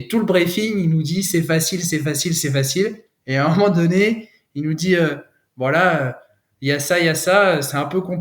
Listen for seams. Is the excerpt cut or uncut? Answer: uncut